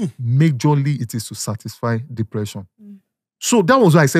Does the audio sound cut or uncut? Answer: uncut